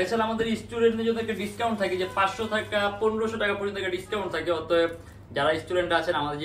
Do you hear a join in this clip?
no; 0 cuts

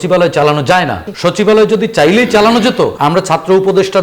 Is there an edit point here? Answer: yes; 2 cuts; at 1.0 s, 3.0 s

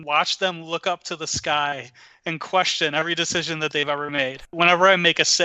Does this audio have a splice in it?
yes; 1 cut; at 4.5 s

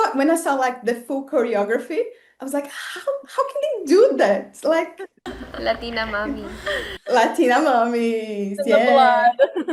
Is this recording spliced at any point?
no; 0 cuts

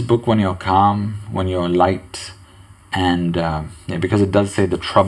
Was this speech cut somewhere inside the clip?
no; 0 cuts

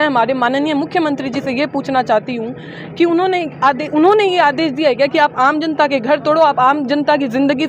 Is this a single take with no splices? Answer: yes; 0 cuts

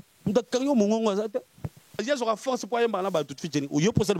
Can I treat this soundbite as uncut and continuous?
no; 1 cut; at 2.0 s

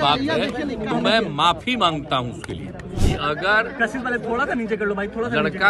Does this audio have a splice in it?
yes; 1 cut; at 3.0 s

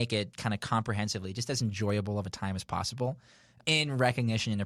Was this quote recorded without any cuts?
yes; 0 cuts

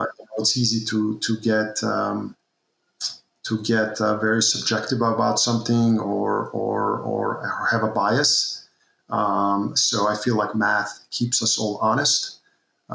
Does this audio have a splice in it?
no; 0 cuts

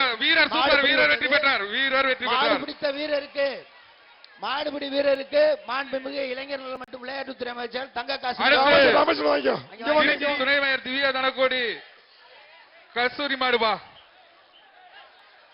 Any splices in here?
yes; 1 cut; at 10.3 s

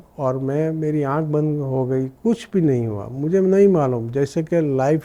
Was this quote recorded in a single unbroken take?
yes; 0 cuts

